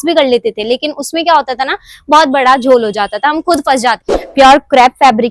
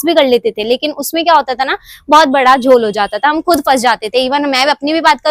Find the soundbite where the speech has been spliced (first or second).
first